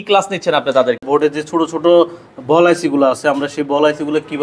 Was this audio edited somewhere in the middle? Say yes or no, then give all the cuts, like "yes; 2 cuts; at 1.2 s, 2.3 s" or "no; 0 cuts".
yes; 1 cut; at 1.0 s